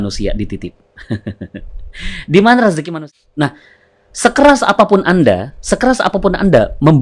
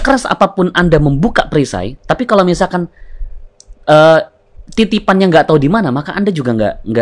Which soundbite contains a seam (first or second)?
first